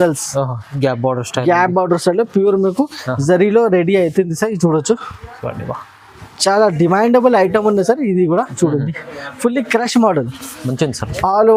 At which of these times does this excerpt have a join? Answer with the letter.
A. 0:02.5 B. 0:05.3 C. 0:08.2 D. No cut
D